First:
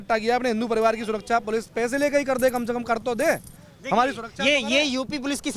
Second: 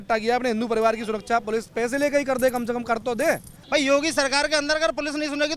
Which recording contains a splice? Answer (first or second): second